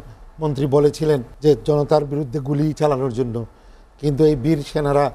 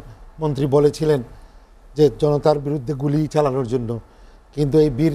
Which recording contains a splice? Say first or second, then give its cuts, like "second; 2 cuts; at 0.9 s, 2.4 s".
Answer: first; 1 cut; at 1.3 s